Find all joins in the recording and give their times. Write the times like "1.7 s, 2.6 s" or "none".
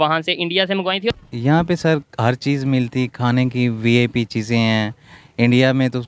1.1 s

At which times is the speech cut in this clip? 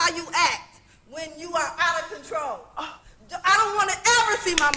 none

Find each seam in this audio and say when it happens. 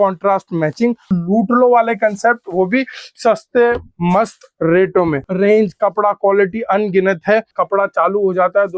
1.1 s, 5.2 s, 7.6 s

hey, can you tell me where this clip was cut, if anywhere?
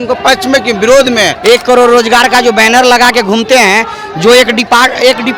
1.3 s

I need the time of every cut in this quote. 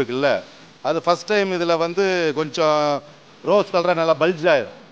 none

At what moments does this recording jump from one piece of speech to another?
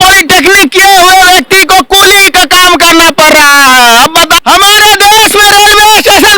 4.4 s

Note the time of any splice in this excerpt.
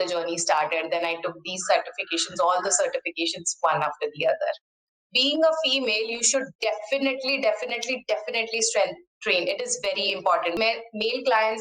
4.7 s, 10.6 s

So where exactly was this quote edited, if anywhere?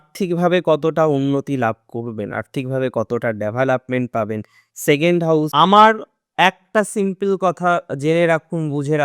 5.5 s

